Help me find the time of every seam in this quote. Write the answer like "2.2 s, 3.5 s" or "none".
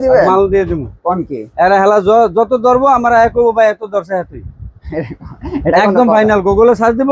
none